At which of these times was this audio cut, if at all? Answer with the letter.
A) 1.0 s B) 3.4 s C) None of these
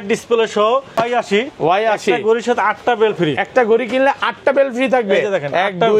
A